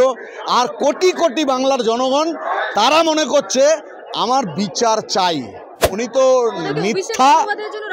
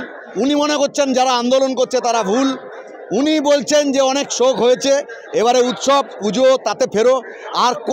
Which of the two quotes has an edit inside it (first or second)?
first